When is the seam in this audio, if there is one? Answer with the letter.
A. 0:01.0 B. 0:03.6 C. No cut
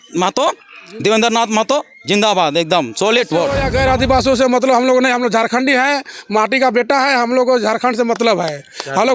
B